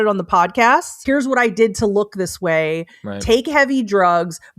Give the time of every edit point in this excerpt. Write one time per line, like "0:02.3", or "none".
0:00.9